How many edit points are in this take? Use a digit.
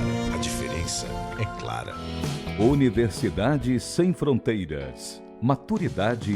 1